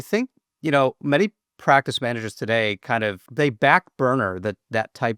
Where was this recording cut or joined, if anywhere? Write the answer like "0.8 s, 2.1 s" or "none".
3.2 s